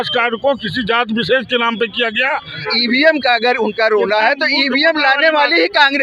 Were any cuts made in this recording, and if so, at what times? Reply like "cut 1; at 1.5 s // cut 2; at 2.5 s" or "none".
cut 1; at 2.7 s